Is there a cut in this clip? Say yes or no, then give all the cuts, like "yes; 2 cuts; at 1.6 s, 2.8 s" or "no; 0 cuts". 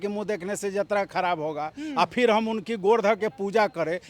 no; 0 cuts